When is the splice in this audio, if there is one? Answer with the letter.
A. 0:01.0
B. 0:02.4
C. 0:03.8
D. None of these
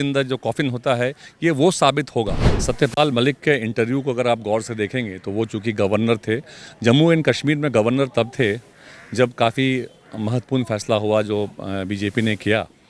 B